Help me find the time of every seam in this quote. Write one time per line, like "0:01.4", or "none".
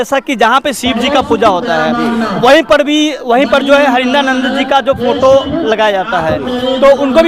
none